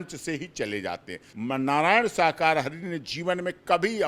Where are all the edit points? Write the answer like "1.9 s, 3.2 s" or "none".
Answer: 1.2 s